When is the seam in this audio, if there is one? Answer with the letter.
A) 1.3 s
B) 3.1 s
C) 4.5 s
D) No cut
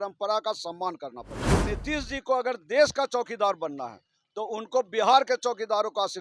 A